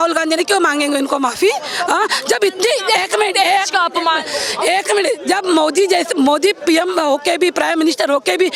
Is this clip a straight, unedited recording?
yes; 0 cuts

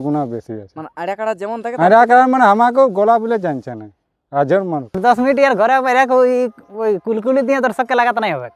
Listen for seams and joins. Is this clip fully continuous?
no; 1 cut; at 4.9 s

